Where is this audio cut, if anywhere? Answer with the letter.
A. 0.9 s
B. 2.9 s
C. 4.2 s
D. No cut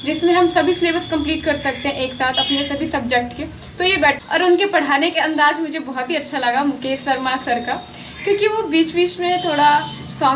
C